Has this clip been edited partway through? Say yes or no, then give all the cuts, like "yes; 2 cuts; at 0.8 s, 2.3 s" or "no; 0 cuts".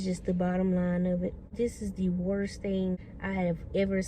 yes; 2 cuts; at 1.4 s, 3.1 s